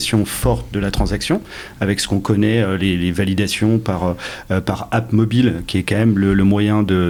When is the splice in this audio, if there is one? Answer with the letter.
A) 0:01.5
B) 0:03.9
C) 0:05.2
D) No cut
D